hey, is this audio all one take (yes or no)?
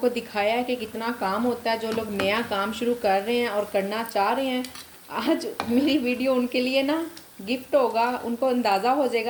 yes